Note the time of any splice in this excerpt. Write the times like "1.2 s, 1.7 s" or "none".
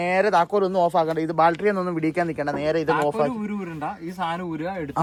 none